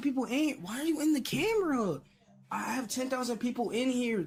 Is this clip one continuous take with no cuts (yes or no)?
yes